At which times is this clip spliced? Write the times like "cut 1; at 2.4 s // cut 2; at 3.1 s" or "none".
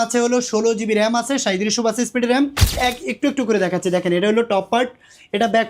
cut 1; at 2.8 s